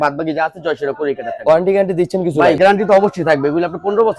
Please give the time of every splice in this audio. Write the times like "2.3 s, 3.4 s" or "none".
none